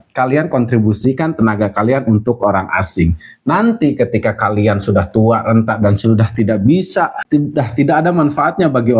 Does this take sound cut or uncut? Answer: cut